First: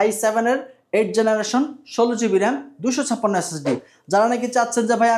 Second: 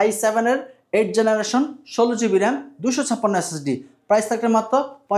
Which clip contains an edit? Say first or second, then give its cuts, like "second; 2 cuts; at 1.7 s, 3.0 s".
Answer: first; 1 cut; at 3.9 s